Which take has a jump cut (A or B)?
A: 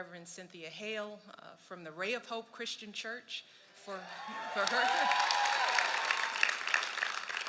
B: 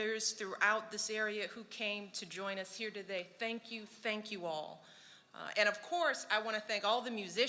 A